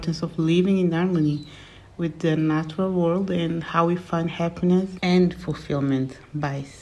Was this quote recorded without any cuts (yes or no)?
yes